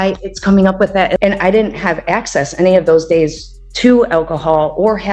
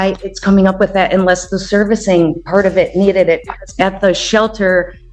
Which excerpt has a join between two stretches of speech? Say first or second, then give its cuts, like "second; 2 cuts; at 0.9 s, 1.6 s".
first; 1 cut; at 1.2 s